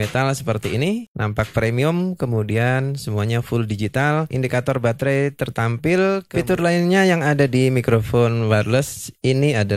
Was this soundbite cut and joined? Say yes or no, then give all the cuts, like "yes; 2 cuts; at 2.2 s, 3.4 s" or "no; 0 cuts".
yes; 2 cuts; at 4.3 s, 6.3 s